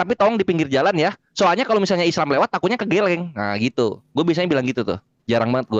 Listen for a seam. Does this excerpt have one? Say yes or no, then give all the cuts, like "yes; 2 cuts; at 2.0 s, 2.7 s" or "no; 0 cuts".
no; 0 cuts